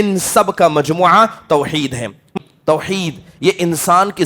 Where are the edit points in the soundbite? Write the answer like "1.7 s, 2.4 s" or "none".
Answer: 2.3 s